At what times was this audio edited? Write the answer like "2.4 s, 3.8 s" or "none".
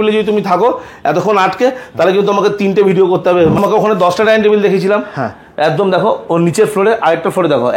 3.6 s